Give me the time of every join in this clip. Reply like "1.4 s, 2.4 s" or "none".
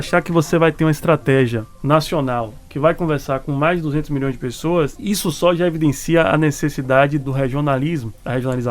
1.7 s, 5.0 s